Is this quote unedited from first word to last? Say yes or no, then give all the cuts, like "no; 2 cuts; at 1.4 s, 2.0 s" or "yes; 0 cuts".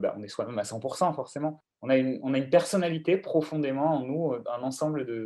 no; 1 cut; at 1.6 s